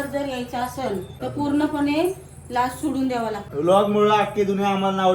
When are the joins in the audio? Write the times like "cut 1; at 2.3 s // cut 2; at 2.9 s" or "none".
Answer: cut 1; at 1.1 s // cut 2; at 3.4 s